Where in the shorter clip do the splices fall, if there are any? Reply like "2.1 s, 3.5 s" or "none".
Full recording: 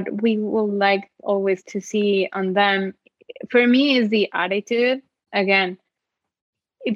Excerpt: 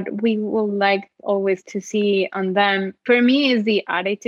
2.9 s